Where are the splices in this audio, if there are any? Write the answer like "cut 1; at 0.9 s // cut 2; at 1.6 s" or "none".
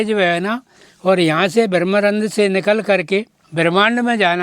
cut 1; at 3.4 s

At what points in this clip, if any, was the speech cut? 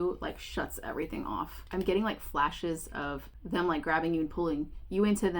cut 1; at 1.6 s // cut 2; at 3.3 s

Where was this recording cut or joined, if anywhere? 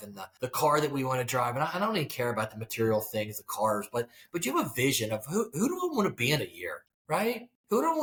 none

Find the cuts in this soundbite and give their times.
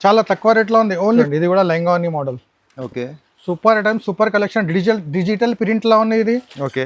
cut 1; at 1.3 s

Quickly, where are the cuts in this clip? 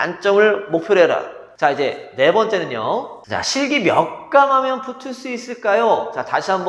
none

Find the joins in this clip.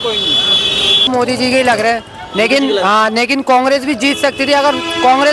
cut 1; at 1.1 s

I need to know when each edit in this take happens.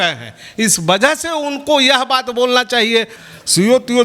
cut 1; at 3.1 s

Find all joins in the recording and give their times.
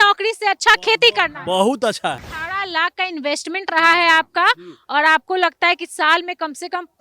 cut 1; at 2.3 s

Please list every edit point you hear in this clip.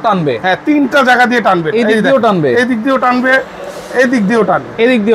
none

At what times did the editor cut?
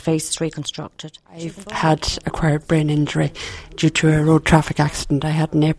cut 1; at 1.6 s

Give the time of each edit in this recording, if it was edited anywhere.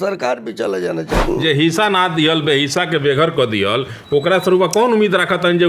cut 1; at 1.2 s

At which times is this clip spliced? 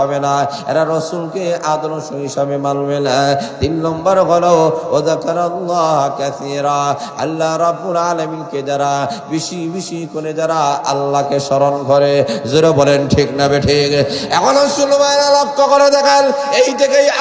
none

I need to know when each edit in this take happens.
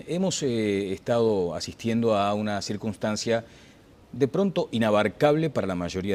cut 1; at 1.0 s

